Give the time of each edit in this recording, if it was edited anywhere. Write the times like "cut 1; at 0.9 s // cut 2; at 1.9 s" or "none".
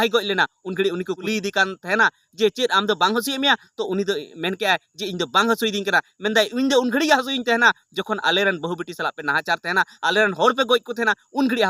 cut 1; at 1.2 s